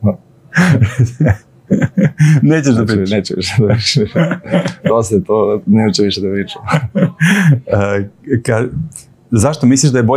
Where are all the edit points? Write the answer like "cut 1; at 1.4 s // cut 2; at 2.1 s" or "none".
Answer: none